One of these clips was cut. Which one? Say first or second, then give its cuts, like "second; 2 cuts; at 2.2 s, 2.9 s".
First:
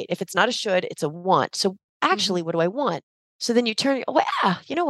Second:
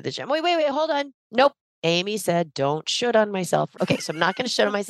second; 1 cut; at 1.7 s